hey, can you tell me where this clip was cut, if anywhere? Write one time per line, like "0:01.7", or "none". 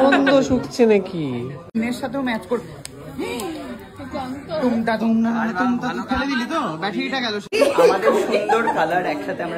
0:01.6
0:07.5